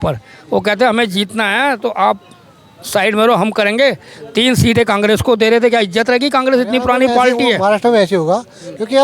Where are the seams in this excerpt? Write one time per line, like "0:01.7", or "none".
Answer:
0:07.6

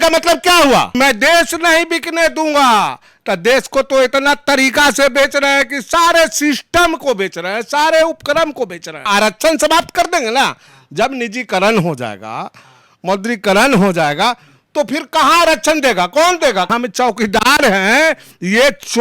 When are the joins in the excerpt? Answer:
0:00.9
0:09.1
0:16.7

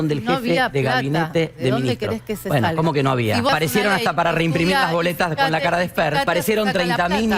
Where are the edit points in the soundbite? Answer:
0:03.5
0:06.3

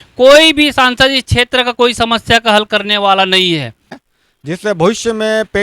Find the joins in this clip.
0:04.0

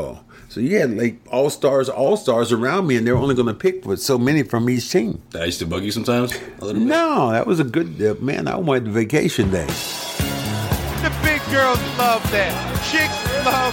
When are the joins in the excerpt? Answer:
0:01.2
0:05.3
0:09.8

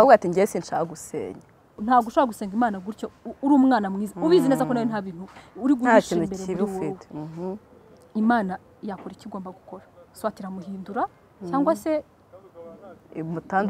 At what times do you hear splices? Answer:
0:01.8

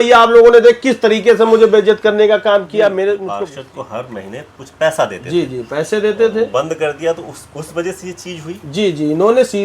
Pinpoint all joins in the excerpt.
0:03.3

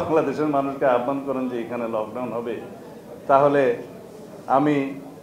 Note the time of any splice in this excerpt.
none

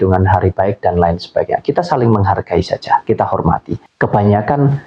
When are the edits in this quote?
0:03.8

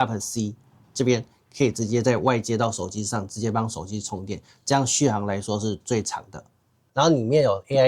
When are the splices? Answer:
0:06.9

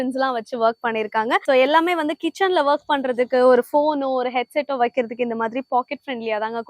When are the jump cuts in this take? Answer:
0:01.4

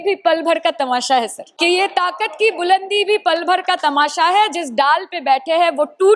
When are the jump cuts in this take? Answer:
0:01.4

